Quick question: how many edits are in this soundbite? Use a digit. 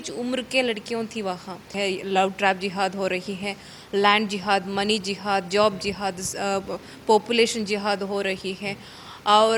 1